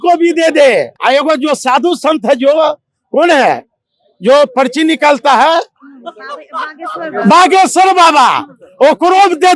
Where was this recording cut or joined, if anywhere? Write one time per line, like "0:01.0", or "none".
0:00.9